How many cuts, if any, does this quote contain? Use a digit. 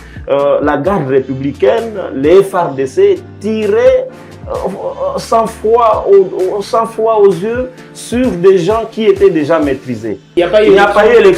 1